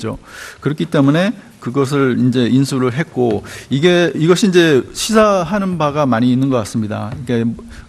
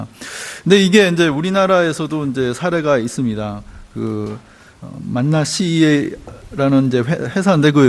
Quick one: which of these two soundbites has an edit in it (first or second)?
first